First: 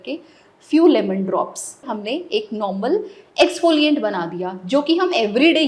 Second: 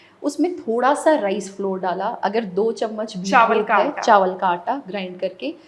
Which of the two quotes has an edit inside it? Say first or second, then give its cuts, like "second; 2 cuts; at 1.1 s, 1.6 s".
first; 1 cut; at 1.9 s